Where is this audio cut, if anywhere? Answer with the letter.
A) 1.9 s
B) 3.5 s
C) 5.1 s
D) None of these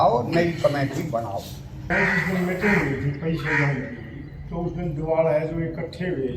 A